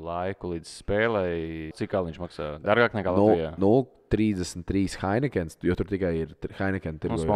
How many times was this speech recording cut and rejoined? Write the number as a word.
one